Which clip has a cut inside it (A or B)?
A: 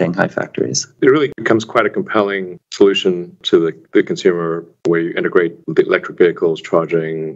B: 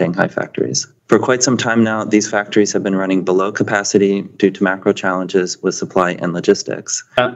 A